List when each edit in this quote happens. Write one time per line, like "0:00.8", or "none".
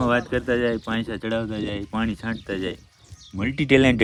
none